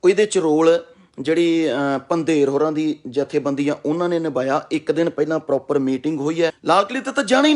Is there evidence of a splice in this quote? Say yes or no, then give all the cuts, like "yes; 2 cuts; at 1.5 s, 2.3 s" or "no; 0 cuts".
yes; 1 cut; at 6.6 s